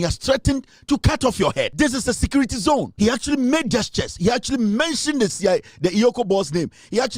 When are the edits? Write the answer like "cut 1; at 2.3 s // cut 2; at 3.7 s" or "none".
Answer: cut 1; at 1.7 s // cut 2; at 2.9 s